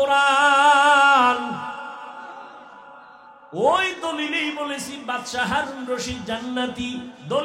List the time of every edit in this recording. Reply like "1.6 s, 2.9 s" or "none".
none

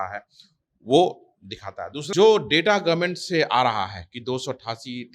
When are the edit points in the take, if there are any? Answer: 1.9 s

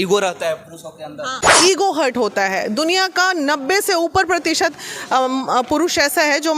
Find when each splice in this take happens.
1.4 s

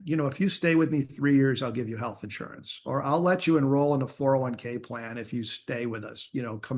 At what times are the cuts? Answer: none

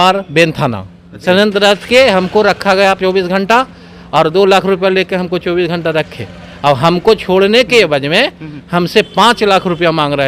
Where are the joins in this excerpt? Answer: 1.1 s

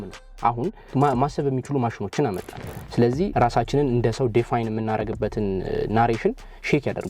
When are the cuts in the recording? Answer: 0.9 s, 3.3 s

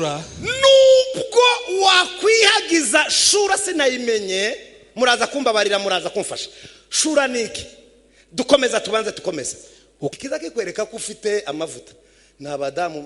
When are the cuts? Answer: 10.1 s

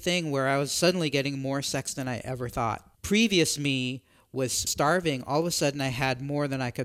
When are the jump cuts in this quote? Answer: 2.9 s, 4.7 s

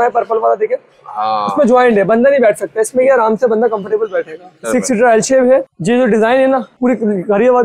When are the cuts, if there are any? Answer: 4.6 s, 5.7 s, 6.7 s

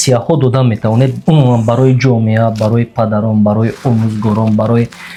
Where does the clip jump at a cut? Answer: none

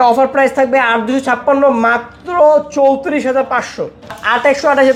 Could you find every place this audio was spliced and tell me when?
none

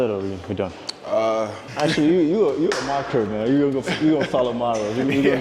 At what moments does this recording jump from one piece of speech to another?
none

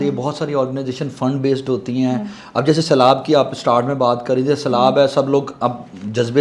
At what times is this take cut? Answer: none

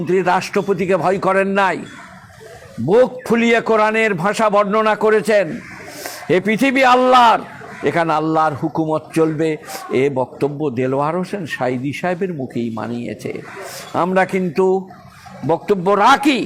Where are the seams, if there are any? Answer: none

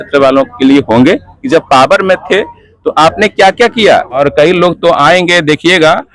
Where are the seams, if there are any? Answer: 1.3 s, 4.2 s

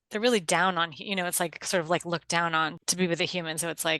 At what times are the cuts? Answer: 2.8 s

